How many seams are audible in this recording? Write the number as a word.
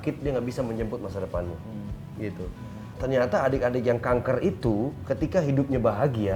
one